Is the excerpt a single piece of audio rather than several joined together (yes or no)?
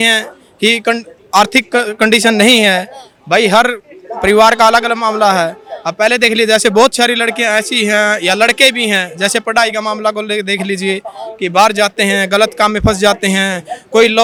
yes